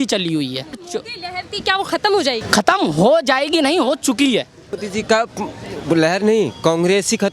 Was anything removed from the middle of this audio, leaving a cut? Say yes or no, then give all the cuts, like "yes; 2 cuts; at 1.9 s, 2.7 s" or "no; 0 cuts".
yes; 3 cuts; at 0.8 s, 2.4 s, 4.8 s